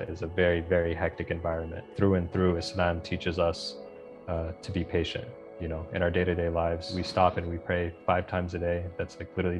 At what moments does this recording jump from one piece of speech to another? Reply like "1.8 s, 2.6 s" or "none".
1.9 s, 7.0 s